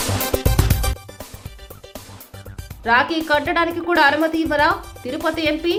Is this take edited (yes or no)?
no